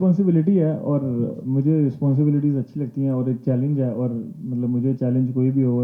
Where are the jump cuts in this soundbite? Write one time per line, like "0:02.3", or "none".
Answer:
none